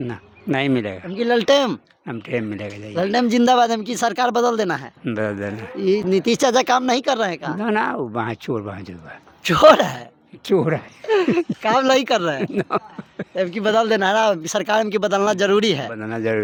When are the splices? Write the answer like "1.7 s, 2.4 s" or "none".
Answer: none